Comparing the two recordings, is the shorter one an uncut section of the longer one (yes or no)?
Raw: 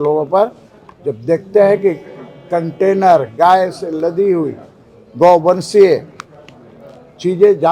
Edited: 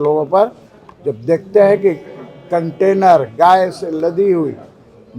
yes